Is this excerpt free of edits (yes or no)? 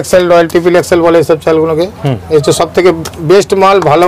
yes